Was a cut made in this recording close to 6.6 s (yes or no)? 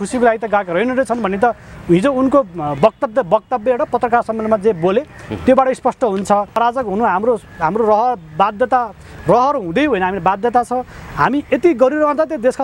yes